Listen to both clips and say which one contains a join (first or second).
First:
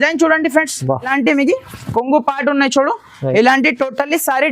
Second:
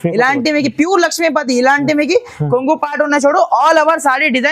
first